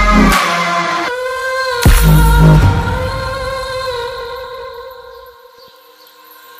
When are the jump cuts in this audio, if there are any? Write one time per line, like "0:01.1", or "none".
none

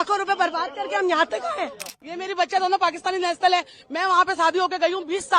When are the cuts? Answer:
0:02.0

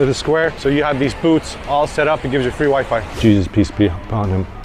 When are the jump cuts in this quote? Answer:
0:03.1

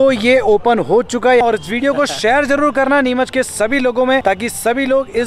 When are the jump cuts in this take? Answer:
0:01.4

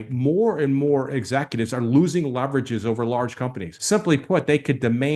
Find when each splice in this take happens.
0:03.7

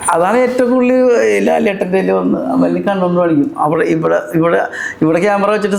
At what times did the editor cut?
none

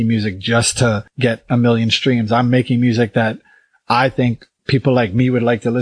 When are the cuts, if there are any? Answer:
0:01.1
0:04.5

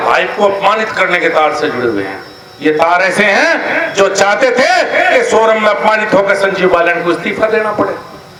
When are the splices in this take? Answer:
none

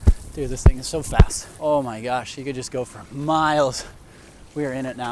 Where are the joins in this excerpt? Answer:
0:01.4

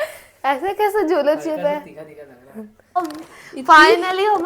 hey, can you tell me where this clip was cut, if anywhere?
0:03.0

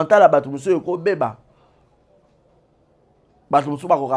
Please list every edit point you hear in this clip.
none

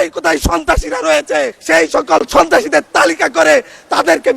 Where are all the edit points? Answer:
0:01.6

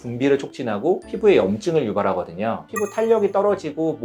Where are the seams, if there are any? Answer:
none

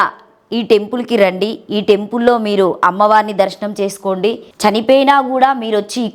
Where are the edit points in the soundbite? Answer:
0:04.5

